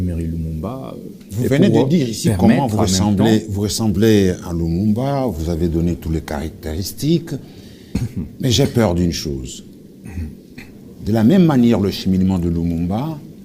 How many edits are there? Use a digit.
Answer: 1